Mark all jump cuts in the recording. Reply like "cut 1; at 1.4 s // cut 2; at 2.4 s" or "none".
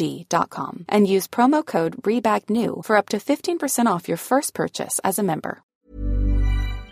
cut 1; at 5.7 s